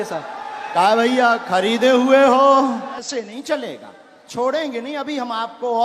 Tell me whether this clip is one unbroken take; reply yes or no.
no